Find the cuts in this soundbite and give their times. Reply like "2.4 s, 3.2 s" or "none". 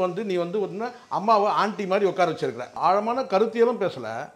2.7 s